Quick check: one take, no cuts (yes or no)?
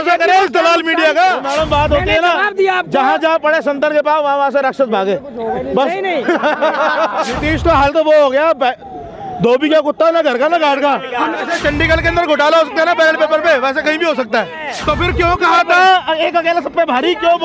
no